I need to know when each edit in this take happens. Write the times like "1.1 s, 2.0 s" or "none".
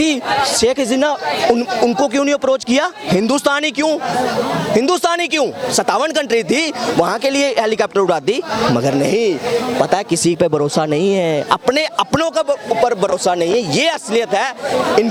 none